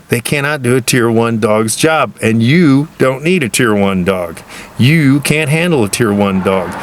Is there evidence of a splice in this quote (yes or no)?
no